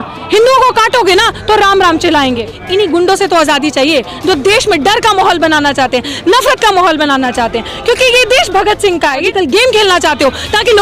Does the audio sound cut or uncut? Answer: cut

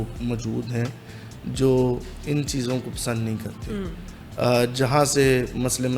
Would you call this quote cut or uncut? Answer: uncut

